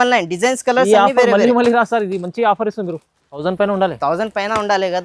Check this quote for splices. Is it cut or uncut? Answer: cut